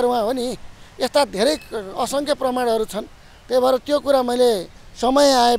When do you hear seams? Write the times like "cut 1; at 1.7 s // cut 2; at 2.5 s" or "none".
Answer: none